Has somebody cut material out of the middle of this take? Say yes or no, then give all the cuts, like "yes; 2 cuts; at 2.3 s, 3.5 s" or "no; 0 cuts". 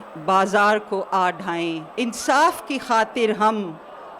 yes; 1 cut; at 1.9 s